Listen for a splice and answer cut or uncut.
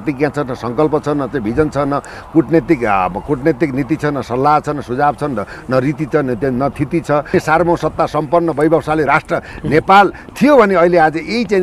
cut